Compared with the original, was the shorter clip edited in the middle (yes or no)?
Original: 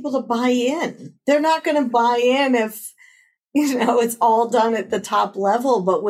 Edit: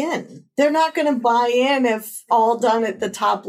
yes